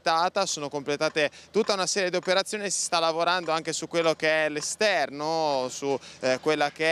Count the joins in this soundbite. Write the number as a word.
zero